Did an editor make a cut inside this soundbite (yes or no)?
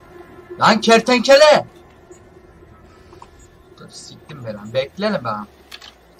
no